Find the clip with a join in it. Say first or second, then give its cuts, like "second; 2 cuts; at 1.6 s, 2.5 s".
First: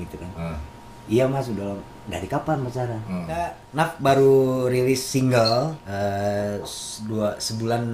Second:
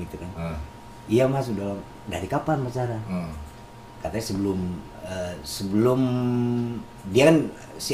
first; 2 cuts; at 3.6 s, 5.8 s